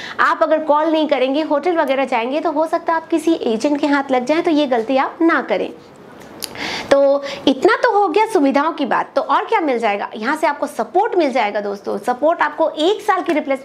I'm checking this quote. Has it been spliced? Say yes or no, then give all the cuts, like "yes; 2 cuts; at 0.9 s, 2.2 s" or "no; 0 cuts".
no; 0 cuts